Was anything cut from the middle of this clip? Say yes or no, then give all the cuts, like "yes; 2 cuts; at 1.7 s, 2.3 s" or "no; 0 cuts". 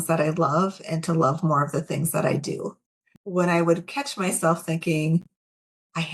yes; 1 cut; at 3.1 s